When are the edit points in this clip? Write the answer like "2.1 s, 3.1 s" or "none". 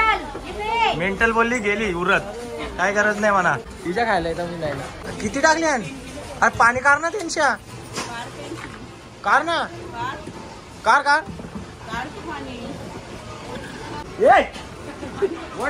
3.7 s, 5.0 s, 14.0 s